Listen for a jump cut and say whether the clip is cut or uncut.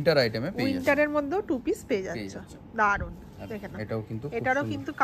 uncut